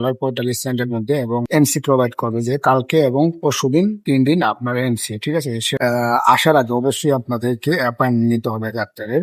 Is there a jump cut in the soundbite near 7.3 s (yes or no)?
no